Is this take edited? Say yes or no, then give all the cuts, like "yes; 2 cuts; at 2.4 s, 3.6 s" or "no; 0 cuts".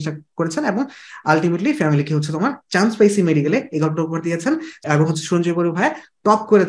no; 0 cuts